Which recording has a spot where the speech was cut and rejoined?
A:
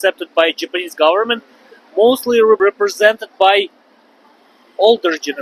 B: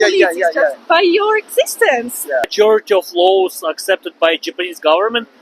B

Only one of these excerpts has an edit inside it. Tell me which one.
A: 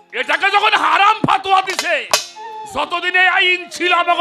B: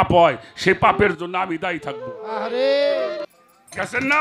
B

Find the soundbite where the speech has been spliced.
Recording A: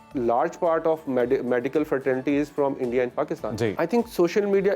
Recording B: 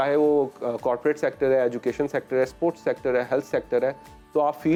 A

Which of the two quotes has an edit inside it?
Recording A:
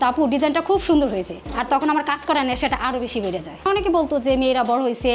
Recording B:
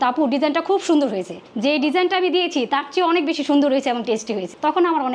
A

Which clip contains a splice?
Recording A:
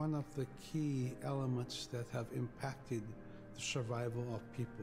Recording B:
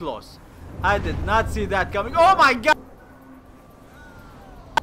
B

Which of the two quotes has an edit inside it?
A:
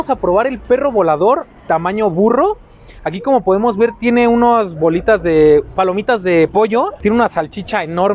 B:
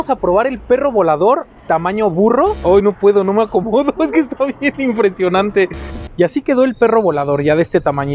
B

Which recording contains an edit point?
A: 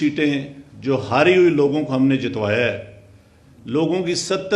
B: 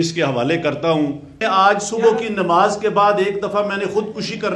B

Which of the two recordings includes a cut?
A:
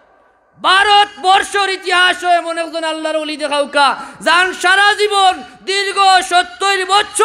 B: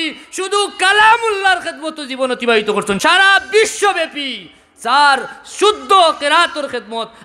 B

